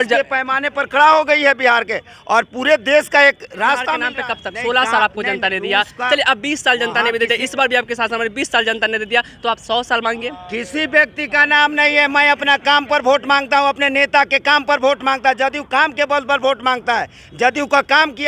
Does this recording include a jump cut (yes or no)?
yes